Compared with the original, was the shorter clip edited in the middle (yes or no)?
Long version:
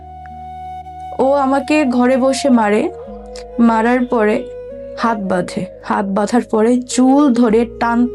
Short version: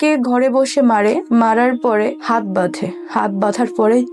yes